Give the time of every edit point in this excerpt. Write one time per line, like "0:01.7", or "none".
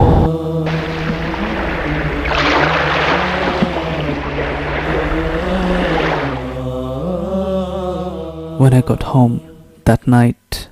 0:06.1

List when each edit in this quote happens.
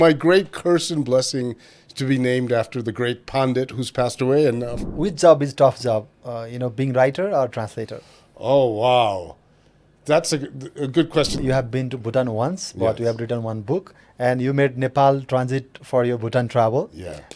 0:04.8
0:11.4

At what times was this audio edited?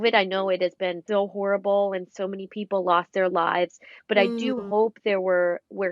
0:01.0

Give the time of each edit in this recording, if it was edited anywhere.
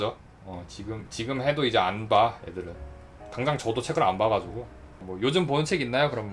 0:05.1

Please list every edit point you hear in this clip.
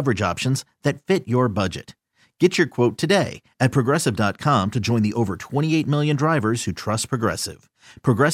none

